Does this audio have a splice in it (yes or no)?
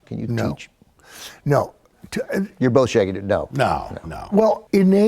no